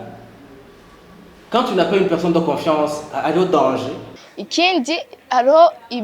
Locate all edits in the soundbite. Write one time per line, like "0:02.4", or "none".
0:04.1